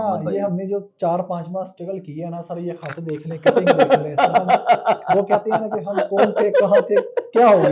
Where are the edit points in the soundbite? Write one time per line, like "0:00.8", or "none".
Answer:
none